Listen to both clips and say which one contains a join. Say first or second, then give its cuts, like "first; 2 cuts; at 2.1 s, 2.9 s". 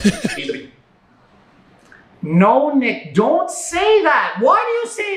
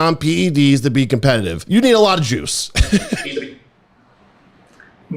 second; 1 cut; at 1.7 s